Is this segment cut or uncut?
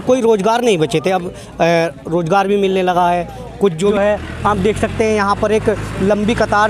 cut